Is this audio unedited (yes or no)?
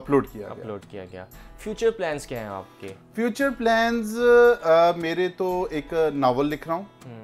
yes